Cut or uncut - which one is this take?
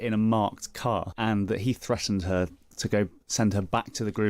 cut